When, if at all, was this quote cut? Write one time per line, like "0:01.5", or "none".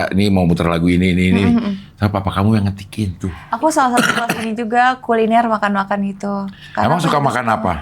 0:03.4